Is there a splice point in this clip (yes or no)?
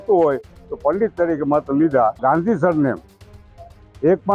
yes